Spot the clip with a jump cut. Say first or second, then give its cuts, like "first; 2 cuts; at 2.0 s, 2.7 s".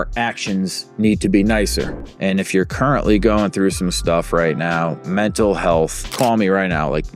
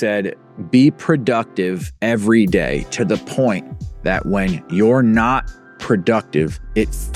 first; 2 cuts; at 2.0 s, 6.1 s